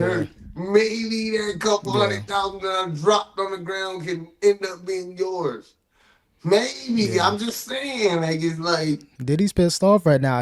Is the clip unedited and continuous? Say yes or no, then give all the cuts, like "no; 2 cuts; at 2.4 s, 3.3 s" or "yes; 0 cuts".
no; 1 cut; at 9.1 s